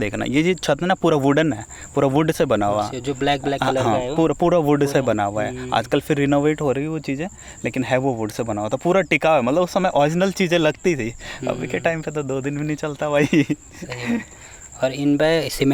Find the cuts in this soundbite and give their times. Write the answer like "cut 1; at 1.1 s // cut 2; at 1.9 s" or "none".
none